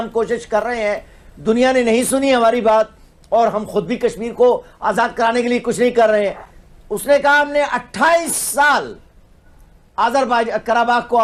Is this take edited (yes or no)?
no